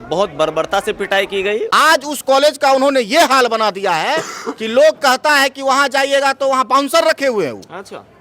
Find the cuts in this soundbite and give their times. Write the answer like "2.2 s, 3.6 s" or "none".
1.7 s